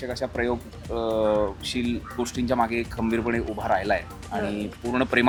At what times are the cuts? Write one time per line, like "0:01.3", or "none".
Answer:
none